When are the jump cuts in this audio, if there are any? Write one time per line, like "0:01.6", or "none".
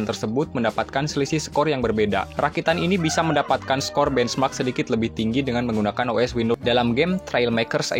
0:06.6